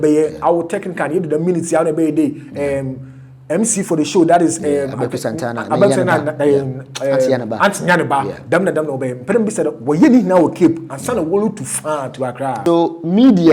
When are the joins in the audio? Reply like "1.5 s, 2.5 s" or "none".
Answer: 12.6 s